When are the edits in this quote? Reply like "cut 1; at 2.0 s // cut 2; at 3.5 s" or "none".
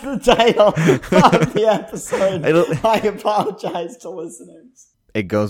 cut 1; at 4.6 s